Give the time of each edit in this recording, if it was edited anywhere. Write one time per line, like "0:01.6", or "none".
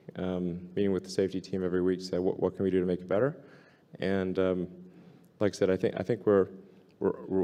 none